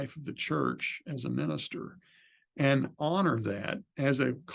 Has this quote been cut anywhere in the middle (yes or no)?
no